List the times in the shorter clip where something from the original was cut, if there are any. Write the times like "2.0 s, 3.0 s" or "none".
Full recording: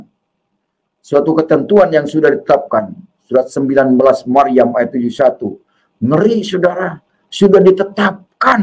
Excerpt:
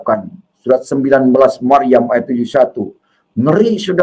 none